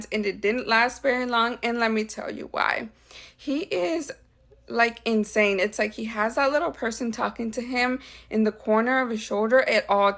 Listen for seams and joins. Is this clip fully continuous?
yes; 0 cuts

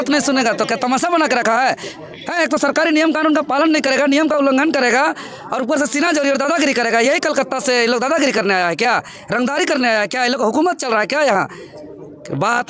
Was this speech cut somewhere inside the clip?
no; 0 cuts

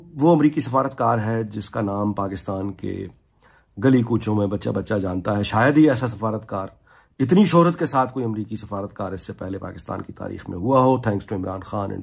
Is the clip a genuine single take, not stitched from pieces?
yes; 0 cuts

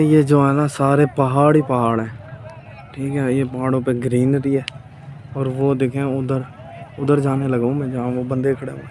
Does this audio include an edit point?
no; 0 cuts

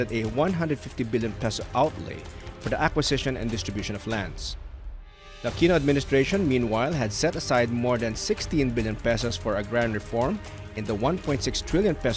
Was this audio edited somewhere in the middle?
yes; 1 cut; at 9.0 s

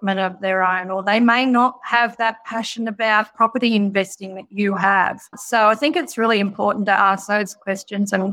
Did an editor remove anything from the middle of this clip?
no; 0 cuts

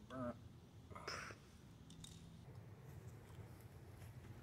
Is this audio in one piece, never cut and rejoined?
no; 1 cut; at 2.5 s

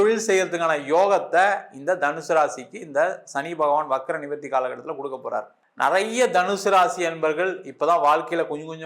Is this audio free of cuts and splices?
no; 1 cut; at 5.6 s

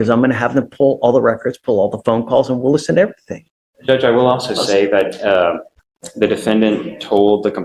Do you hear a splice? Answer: no; 0 cuts

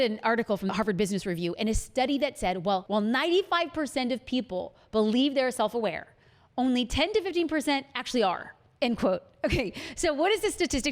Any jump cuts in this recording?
yes; 2 cuts; at 0.7 s, 2.8 s

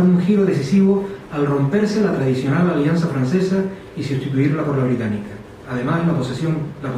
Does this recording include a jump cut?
yes; 1 cut; at 4.8 s

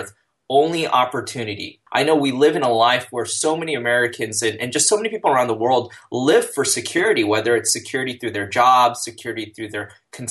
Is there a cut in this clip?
yes; 1 cut; at 1.8 s

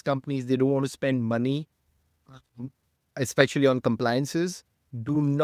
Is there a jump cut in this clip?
no; 0 cuts

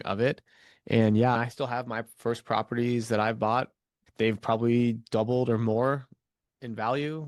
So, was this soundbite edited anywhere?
no; 0 cuts

